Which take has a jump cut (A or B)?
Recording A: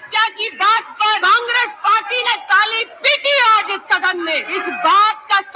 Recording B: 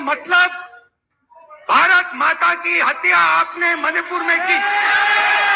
A